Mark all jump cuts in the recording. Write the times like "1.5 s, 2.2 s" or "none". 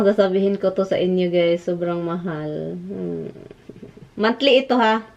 none